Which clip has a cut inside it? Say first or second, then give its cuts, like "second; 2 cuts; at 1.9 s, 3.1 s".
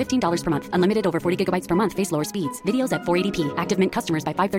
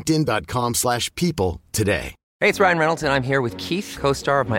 second; 1 cut; at 2.2 s